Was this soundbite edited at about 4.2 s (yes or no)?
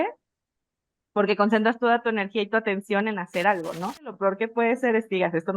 yes